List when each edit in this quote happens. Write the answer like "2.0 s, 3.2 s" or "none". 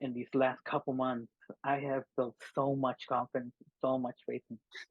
none